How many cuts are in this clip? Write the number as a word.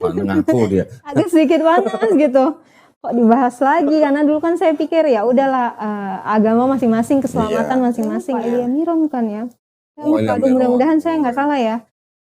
one